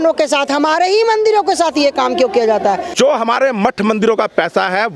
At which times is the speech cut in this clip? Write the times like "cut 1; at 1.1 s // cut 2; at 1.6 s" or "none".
cut 1; at 2.9 s